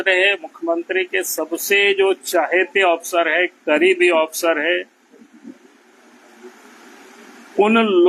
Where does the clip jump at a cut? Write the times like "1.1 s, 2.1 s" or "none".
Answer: none